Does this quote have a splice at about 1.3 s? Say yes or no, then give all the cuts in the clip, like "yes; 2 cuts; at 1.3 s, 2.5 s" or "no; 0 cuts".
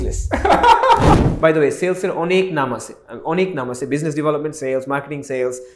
yes; 1 cut; at 1.3 s